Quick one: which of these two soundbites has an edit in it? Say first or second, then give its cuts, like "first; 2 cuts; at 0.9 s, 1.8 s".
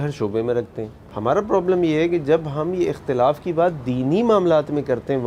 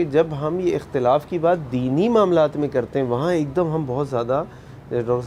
first; 1 cut; at 1.1 s